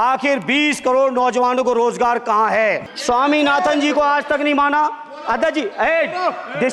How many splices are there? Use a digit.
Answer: 1